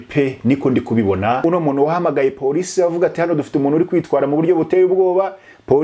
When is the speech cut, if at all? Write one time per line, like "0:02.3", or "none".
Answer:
0:01.4